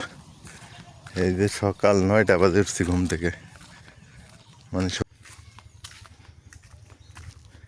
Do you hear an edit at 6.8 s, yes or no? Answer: no